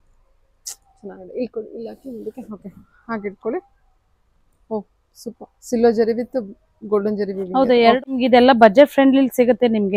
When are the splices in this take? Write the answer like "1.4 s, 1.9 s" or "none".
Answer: 8.0 s